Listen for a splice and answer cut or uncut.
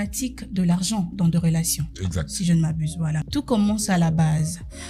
cut